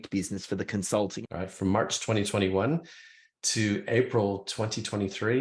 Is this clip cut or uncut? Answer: cut